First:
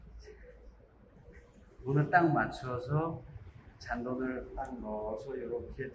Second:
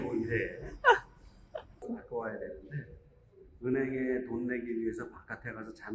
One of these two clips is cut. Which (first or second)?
second